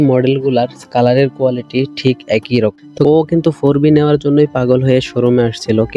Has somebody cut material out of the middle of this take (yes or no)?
yes